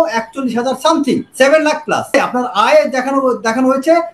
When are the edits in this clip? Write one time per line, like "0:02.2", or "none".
0:01.3
0:02.1